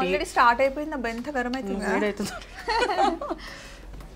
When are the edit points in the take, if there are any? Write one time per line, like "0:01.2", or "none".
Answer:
none